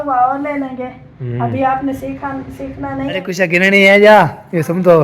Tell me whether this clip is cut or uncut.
cut